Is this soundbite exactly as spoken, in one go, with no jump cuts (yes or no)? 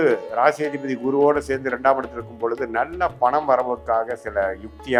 yes